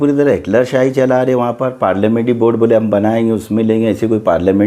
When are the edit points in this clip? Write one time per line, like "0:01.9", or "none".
none